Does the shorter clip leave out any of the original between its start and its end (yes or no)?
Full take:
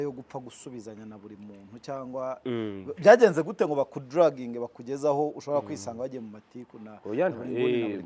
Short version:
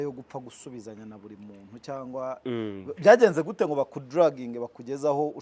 no